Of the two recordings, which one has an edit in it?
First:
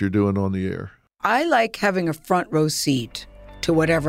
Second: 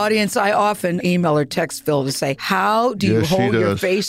second; 2 cuts; at 1.0 s, 2.4 s

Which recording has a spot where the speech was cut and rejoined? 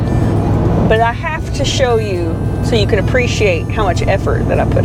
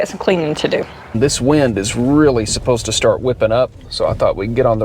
second; 2 cuts; at 1.1 s, 3.8 s

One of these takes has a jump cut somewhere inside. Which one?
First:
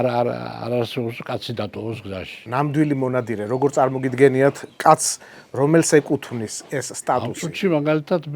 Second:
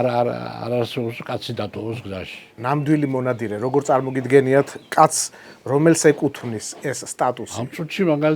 first; 2 cuts; at 2.3 s, 7.3 s

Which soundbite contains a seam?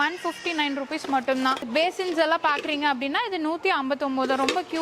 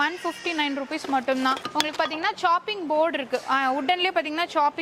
first; 1 cut; at 1.7 s

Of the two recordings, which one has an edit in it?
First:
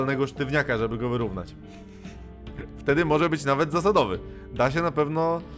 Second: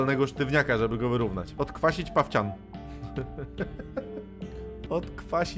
second; 2 cuts; at 1.5 s, 4.8 s

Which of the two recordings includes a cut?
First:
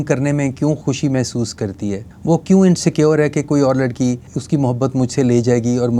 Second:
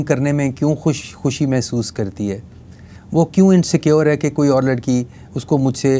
first; 3 cuts; at 0.8 s, 2.1 s, 4.3 s

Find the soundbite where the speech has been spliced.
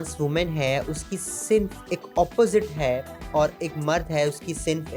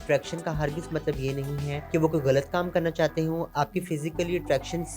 second; 2 cuts; at 1.7 s, 3.5 s

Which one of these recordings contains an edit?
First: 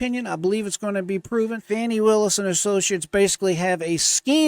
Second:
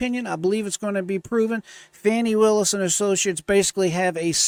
first; 1 cut; at 1.6 s

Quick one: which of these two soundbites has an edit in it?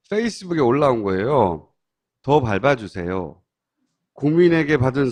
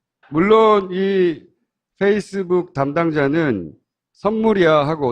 second; 1 cut; at 1.0 s

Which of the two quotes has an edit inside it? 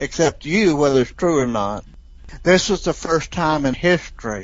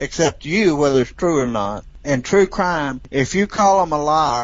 first; 1 cut; at 2.0 s

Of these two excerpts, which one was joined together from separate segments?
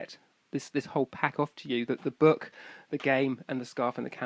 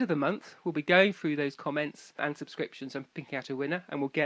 second; 2 cuts; at 2.2 s, 3.1 s

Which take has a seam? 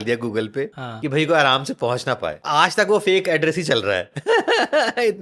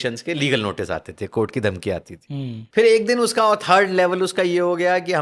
first; 1 cut; at 2.4 s

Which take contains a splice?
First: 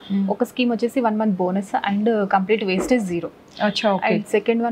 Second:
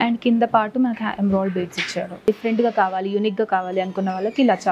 second; 1 cut; at 2.3 s

